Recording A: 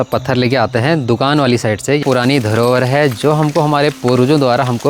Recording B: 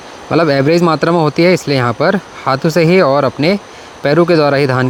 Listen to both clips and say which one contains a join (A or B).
A